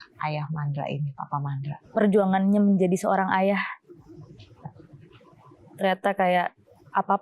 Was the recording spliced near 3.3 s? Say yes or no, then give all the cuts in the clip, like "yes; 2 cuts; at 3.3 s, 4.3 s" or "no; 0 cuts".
no; 1 cut; at 1.7 s